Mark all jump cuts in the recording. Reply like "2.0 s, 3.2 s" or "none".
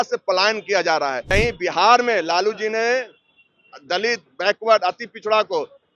1.2 s